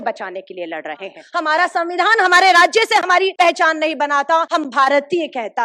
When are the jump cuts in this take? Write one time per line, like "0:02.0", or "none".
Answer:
0:01.1
0:03.3
0:04.5